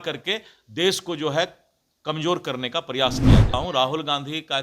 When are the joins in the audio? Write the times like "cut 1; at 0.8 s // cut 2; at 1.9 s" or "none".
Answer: cut 1; at 3.5 s